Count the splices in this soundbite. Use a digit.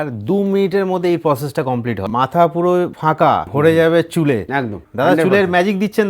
1